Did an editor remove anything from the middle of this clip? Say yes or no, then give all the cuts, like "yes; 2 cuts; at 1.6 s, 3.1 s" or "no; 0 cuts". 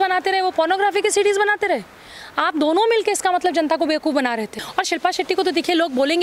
yes; 1 cut; at 4.6 s